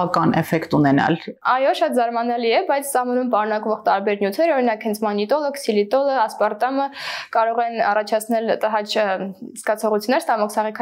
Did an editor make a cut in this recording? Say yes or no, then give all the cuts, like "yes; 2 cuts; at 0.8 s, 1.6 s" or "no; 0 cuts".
no; 0 cuts